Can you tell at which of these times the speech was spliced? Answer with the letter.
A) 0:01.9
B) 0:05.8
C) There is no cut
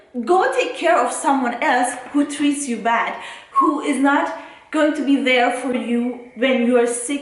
B